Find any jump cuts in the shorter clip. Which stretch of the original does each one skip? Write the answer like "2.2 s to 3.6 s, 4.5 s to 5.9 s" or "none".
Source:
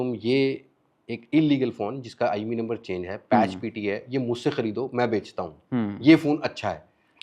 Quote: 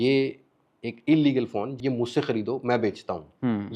2.0 s to 4.0 s